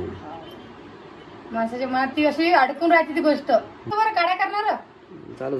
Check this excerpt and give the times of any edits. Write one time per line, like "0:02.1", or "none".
0:03.9